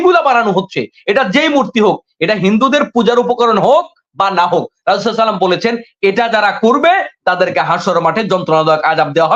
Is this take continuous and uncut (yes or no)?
yes